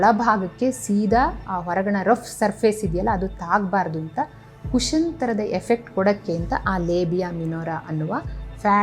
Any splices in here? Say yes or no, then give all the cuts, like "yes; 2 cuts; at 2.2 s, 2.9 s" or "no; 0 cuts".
no; 0 cuts